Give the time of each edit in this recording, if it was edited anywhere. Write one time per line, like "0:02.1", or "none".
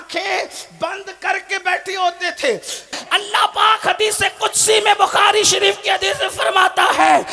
0:02.9